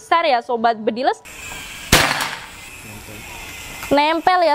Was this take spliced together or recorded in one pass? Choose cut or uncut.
cut